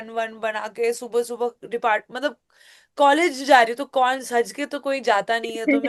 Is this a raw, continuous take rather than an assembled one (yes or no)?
yes